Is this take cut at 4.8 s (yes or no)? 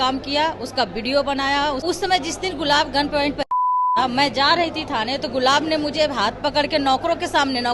no